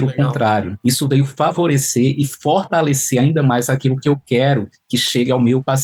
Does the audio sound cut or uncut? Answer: uncut